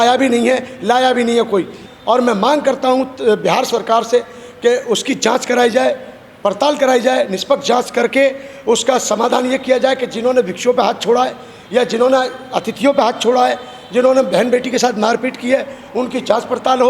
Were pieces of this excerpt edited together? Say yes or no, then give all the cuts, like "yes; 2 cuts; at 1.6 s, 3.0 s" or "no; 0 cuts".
yes; 1 cut; at 1.8 s